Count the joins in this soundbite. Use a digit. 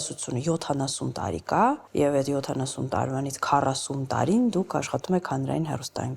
1